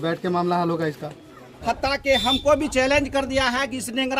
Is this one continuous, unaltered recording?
no; 1 cut; at 1.5 s

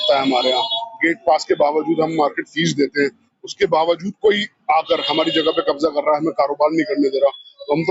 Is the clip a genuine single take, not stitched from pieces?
yes; 0 cuts

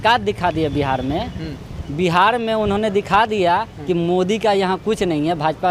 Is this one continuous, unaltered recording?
yes; 0 cuts

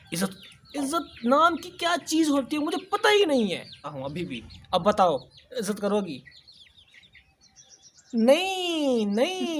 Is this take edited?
yes; 1 cut; at 3.9 s

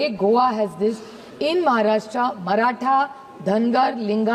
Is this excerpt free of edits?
yes; 0 cuts

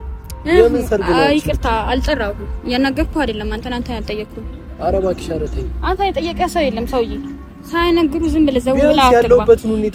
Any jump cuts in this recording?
no; 0 cuts

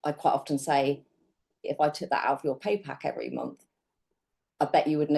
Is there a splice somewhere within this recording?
yes; 1 cut; at 1.6 s

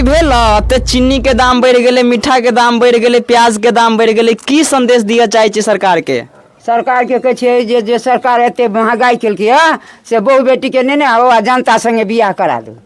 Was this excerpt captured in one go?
yes; 0 cuts

